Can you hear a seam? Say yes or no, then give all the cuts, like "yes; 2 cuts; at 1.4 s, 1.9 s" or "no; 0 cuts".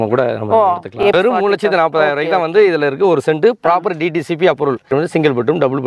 yes; 2 cuts; at 1.1 s, 4.9 s